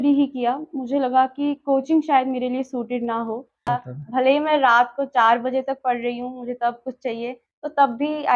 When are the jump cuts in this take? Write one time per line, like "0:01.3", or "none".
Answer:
0:03.7